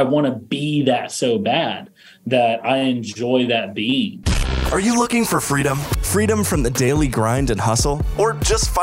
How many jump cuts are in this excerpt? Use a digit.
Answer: 1